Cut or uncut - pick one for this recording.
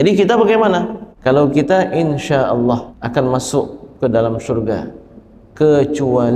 cut